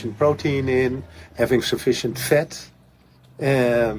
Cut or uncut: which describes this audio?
uncut